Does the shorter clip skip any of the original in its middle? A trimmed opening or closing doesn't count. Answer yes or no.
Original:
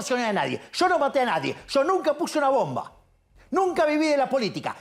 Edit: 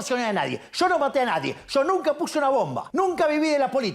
yes